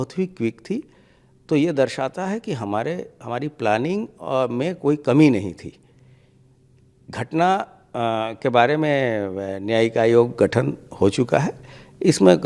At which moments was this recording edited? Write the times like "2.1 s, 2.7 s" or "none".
none